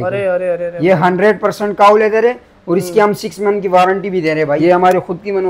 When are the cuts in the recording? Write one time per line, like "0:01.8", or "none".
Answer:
0:04.6